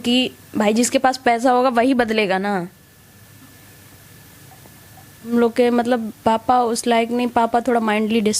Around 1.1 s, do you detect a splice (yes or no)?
no